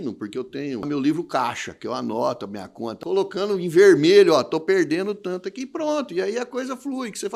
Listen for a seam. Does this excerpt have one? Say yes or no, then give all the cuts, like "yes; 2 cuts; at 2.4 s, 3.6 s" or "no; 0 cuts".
yes; 2 cuts; at 0.8 s, 3.0 s